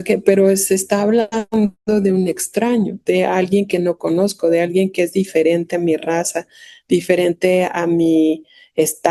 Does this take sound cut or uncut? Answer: uncut